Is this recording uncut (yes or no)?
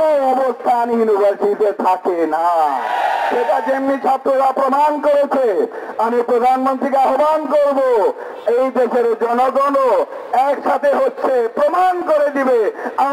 yes